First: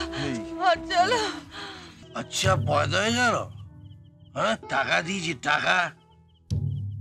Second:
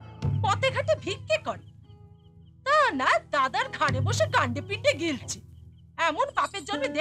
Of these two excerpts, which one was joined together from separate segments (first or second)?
first